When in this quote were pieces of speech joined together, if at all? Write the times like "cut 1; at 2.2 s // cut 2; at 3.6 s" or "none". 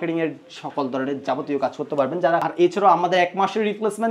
cut 1; at 2.5 s